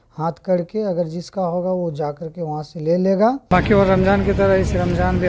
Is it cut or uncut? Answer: cut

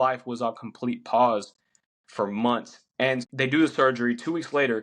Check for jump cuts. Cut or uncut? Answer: cut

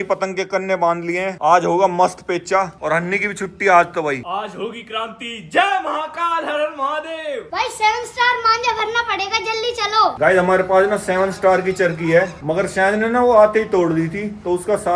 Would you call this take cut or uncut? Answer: uncut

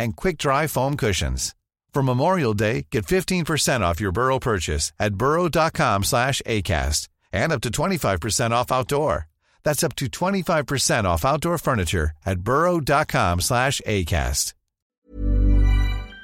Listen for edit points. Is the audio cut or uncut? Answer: cut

